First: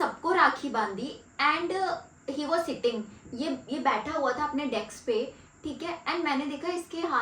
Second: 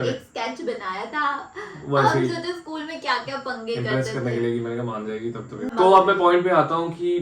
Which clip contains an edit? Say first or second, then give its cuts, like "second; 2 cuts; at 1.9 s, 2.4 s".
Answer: second; 1 cut; at 5.7 s